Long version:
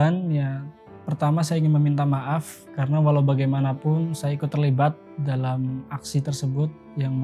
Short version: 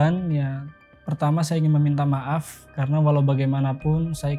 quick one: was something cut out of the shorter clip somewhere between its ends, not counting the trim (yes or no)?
no